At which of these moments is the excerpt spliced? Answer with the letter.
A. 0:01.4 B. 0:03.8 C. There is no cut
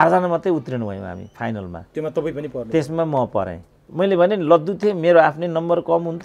B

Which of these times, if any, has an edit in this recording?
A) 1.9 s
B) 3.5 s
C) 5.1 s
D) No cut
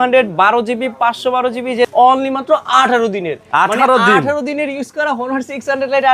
A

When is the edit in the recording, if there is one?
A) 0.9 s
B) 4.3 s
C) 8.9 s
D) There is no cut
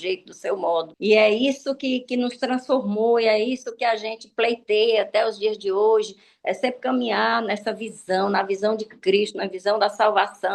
A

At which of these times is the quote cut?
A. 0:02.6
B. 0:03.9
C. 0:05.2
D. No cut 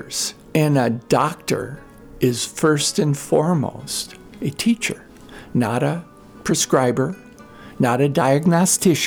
D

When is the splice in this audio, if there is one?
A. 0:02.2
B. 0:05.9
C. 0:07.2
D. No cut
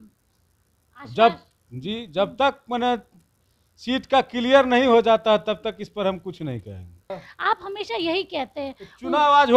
C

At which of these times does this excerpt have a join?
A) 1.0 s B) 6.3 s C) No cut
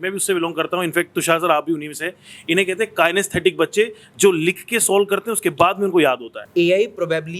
B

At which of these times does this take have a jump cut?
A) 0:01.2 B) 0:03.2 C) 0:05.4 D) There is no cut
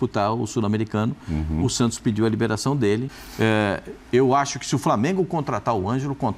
B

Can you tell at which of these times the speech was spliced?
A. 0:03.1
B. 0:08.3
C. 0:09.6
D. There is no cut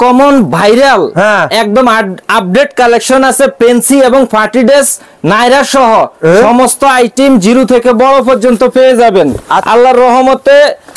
C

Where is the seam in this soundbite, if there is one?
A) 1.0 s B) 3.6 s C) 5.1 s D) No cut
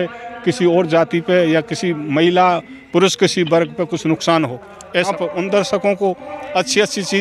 C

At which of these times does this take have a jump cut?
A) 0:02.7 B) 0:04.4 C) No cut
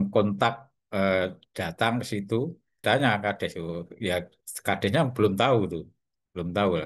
A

